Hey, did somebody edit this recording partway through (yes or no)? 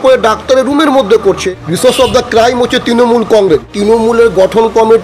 yes